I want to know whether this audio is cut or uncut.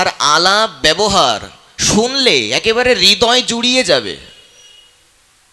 uncut